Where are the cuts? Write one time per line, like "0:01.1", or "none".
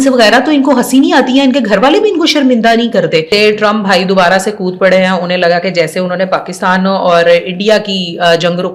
0:03.3